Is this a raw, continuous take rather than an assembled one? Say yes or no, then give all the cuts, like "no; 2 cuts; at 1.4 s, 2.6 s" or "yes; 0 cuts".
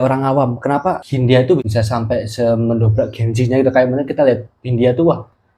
no; 2 cuts; at 1.1 s, 1.6 s